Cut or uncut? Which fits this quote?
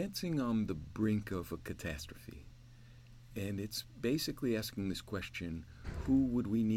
uncut